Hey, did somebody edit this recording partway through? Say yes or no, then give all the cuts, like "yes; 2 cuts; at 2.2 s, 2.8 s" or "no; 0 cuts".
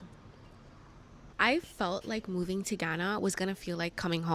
yes; 1 cut; at 1.2 s